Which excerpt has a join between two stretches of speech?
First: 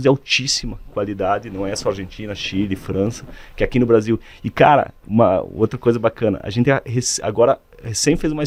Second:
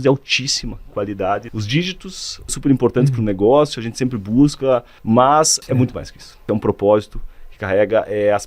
second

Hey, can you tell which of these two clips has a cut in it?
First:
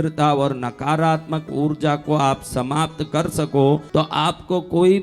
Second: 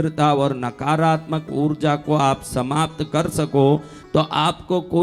first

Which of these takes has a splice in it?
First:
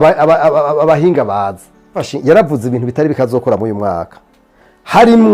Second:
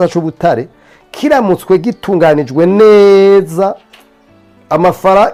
first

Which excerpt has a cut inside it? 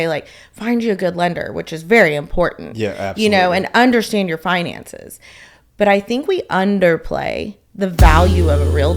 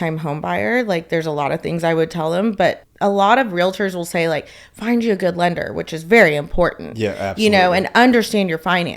second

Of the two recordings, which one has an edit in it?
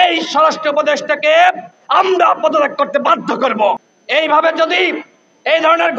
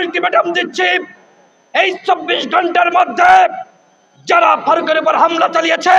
first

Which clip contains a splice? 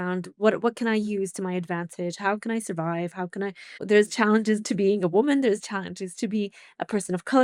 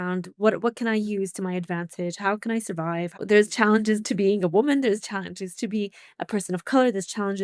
second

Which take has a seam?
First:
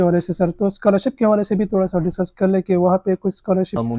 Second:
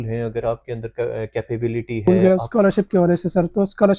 second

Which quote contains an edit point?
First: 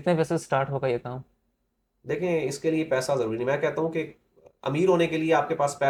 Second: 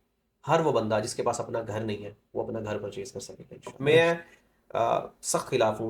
second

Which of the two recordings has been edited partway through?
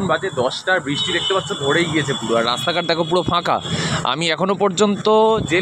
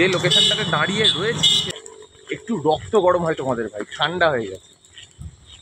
second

